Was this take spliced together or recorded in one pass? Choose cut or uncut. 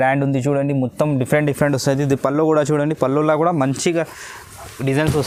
uncut